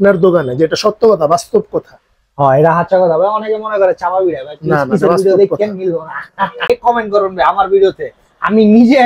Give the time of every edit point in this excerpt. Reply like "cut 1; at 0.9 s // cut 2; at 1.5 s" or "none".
cut 1; at 6.7 s